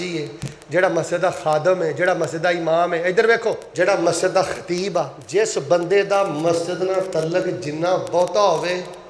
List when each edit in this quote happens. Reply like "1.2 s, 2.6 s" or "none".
3.7 s, 5.2 s